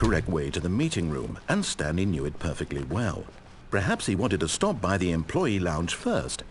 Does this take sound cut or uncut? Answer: uncut